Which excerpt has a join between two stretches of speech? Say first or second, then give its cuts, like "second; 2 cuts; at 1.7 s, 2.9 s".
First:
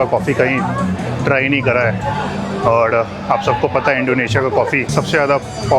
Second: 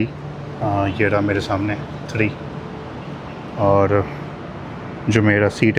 first; 1 cut; at 4.9 s